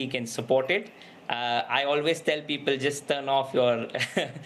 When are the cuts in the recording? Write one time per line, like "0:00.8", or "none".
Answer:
none